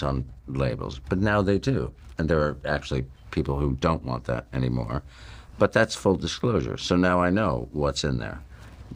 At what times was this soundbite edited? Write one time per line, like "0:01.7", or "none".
none